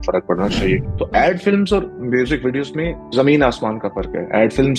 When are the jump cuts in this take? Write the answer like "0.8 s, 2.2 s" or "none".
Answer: 0.9 s, 3.0 s